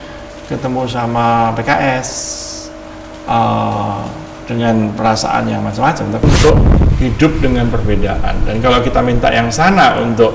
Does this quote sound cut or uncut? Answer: cut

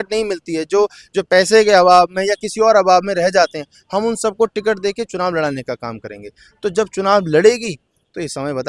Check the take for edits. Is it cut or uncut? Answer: uncut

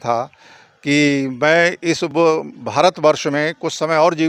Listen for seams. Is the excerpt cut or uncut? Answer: uncut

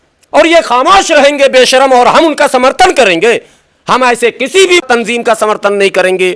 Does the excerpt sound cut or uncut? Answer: cut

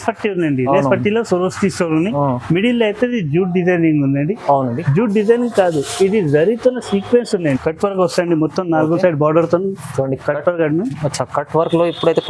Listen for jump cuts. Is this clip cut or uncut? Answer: cut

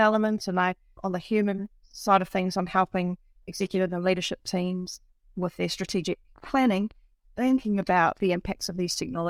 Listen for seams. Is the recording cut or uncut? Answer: uncut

